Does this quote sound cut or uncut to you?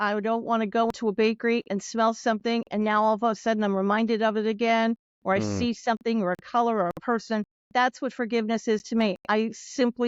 cut